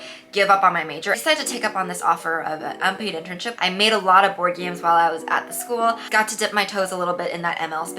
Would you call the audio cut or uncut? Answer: cut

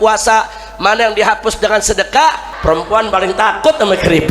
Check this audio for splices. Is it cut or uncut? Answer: cut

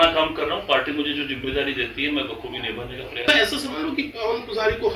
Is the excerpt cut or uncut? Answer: cut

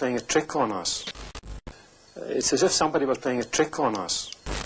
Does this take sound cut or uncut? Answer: uncut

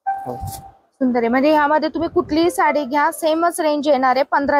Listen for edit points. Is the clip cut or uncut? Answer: uncut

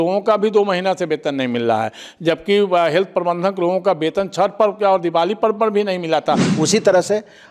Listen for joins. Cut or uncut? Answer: cut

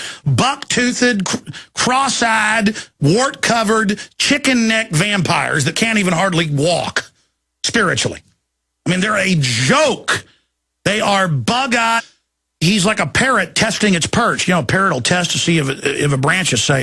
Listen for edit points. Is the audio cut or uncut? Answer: uncut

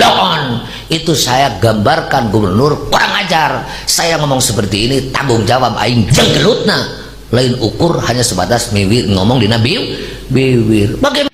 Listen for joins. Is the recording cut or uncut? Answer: uncut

